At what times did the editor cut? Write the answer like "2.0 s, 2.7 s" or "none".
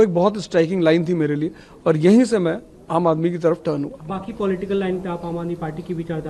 none